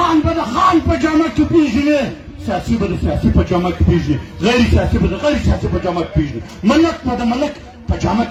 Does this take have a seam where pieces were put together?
no; 0 cuts

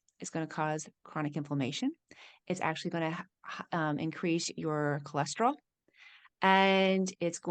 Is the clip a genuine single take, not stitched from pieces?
yes; 0 cuts

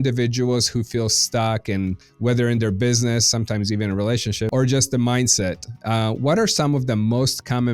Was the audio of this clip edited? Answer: yes; 2 cuts; at 2.1 s, 4.5 s

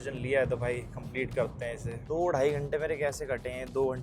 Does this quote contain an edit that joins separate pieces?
yes; 1 cut; at 1.9 s

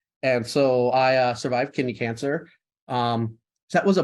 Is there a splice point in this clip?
no; 0 cuts

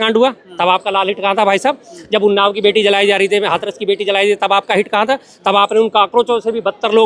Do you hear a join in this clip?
no; 0 cuts

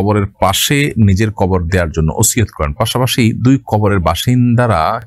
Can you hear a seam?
no; 0 cuts

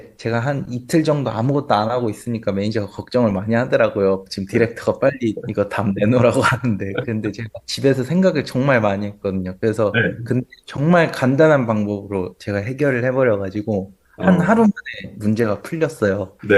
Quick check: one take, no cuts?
yes; 0 cuts

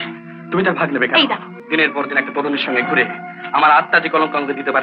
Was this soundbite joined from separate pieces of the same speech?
yes; 1 cut; at 1.5 s

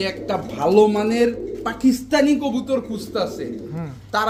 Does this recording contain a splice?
no; 0 cuts

